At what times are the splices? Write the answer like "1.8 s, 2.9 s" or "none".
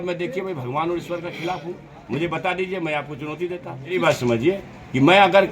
3.9 s